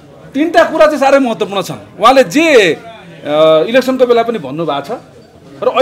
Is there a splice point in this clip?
no; 0 cuts

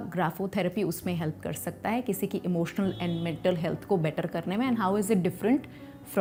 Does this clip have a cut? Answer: no; 0 cuts

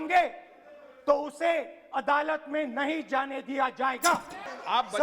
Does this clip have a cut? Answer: yes; 1 cut; at 4.0 s

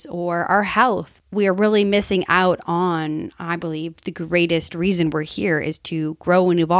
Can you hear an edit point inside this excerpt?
yes; 1 cut; at 1.2 s

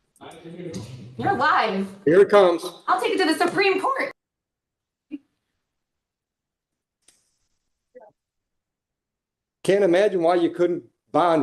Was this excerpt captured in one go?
yes; 0 cuts

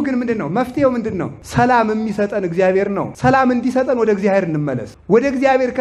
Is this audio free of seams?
no; 3 cuts; at 1.4 s, 3.1 s, 4.9 s

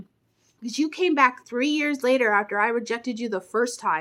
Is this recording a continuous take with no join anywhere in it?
yes; 0 cuts

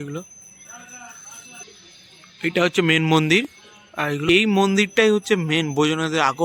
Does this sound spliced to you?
yes; 2 cuts; at 1.6 s, 4.2 s

